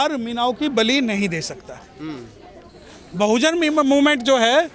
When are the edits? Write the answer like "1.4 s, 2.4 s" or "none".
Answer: none